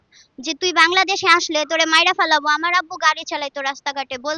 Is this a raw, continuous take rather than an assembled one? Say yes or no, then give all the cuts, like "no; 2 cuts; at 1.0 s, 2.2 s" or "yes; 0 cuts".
yes; 0 cuts